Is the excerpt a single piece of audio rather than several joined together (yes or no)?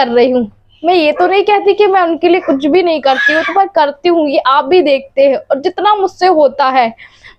yes